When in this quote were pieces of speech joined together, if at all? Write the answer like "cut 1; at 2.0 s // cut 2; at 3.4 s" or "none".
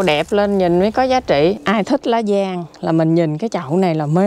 cut 1; at 1.6 s